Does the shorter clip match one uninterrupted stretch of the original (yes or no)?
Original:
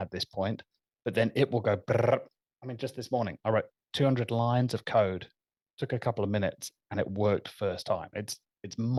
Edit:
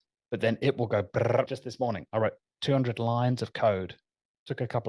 no